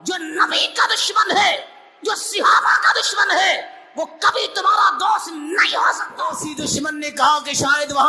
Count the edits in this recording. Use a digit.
1